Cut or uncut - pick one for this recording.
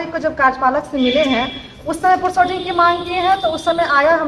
uncut